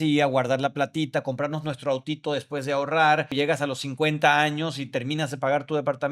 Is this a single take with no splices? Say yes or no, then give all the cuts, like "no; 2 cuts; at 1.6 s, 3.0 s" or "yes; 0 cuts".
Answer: no; 1 cut; at 3.3 s